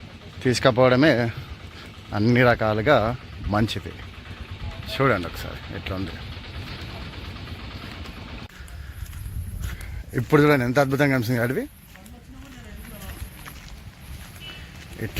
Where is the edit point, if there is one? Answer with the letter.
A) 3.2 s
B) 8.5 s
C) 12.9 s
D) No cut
B